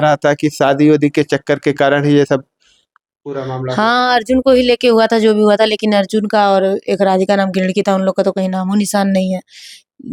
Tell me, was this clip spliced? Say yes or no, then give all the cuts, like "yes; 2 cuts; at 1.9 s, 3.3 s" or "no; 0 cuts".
no; 0 cuts